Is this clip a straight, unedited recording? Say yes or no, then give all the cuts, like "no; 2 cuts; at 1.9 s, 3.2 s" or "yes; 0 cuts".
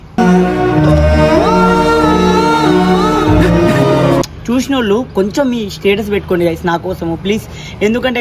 no; 1 cut; at 4.4 s